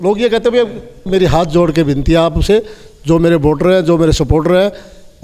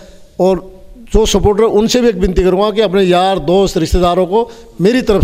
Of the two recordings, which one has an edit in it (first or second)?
first